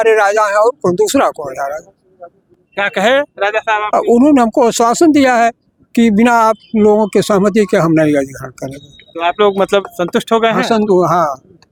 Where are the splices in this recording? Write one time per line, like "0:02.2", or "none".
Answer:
none